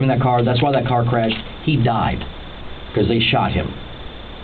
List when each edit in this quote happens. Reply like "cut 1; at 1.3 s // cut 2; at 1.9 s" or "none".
none